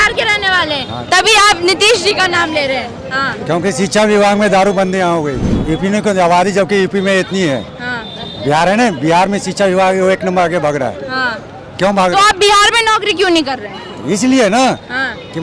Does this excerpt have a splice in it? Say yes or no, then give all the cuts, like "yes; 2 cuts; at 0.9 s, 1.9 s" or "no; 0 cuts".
yes; 1 cut; at 5.5 s